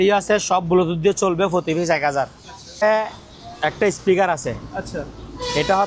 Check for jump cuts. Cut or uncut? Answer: uncut